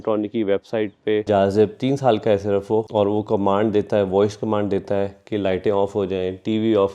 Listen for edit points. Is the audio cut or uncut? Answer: cut